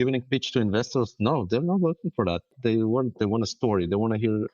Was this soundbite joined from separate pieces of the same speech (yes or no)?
yes